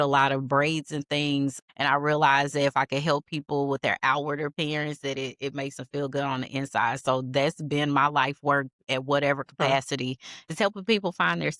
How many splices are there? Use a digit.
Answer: 1